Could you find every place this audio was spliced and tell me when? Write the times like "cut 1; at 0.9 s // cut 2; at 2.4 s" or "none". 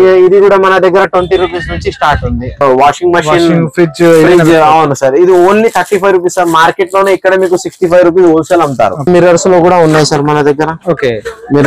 cut 1; at 2.6 s // cut 2; at 9.0 s

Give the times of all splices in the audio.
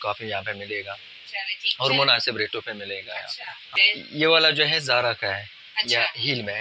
cut 1; at 3.7 s

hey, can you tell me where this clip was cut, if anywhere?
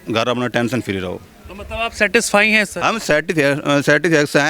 none

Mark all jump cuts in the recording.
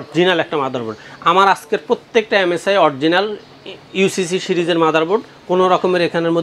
none

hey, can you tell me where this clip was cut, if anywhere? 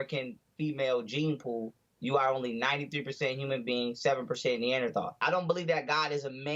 cut 1; at 5.1 s

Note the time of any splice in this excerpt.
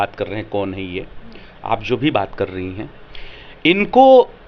none

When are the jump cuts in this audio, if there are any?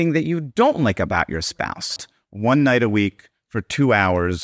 cut 1; at 2.0 s

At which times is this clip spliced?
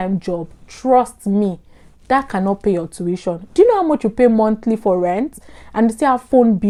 none

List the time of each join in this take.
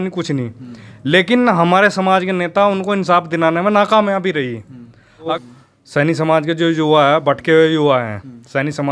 cut 1; at 5.3 s

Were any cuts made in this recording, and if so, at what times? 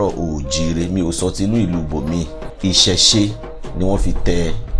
cut 1; at 2.4 s

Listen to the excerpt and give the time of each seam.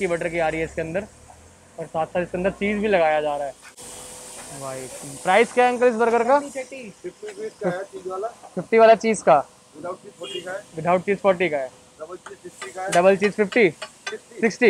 none

